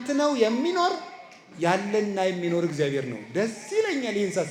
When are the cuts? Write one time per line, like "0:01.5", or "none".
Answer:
none